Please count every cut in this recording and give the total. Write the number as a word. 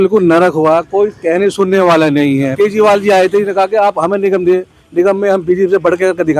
one